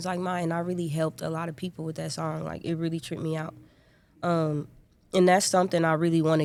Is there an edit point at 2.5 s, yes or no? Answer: no